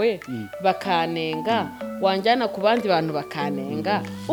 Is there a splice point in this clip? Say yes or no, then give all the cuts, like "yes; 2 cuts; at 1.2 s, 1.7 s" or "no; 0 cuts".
no; 0 cuts